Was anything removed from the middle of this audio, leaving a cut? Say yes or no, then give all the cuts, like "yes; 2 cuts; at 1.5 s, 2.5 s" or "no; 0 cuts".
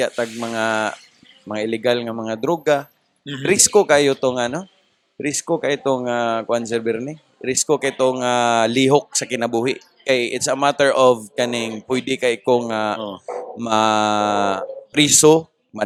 no; 0 cuts